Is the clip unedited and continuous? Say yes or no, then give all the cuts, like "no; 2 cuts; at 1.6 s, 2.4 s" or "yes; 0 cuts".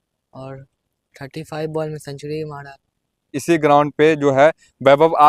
no; 1 cut; at 3.3 s